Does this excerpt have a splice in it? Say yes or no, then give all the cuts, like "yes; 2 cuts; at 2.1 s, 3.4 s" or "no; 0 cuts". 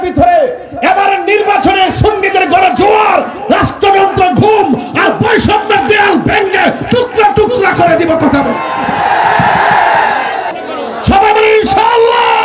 yes; 1 cut; at 10.6 s